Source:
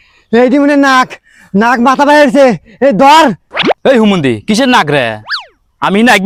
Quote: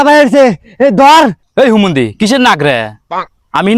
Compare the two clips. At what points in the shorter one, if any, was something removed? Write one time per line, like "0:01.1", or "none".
0:01.5